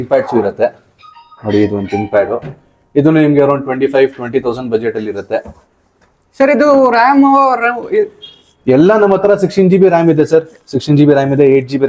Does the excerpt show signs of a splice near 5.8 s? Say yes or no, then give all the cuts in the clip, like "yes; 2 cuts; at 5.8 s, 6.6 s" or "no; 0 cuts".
no; 0 cuts